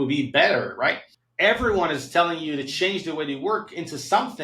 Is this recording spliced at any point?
yes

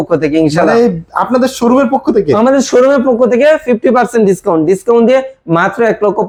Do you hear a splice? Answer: no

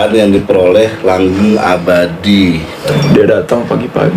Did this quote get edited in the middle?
yes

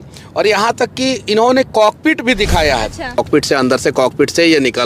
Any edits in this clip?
yes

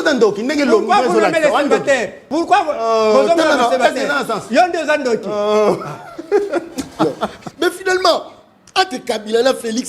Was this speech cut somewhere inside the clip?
yes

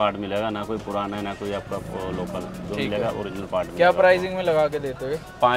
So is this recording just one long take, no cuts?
yes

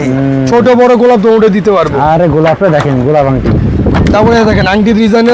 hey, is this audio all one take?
yes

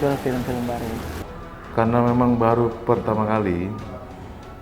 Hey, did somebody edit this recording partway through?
yes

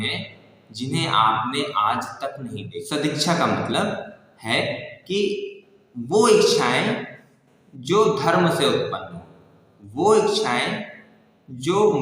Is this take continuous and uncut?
no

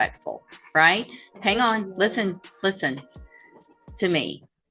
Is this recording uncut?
yes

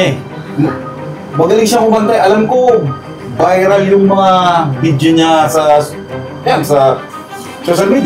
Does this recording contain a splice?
no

